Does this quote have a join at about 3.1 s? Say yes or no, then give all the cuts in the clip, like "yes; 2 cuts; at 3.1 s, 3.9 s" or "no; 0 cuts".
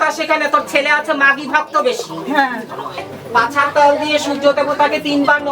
yes; 1 cut; at 3.1 s